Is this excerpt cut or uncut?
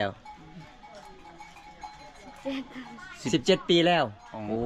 uncut